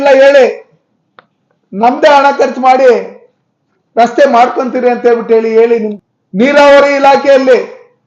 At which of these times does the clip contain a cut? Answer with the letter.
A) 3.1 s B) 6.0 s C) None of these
B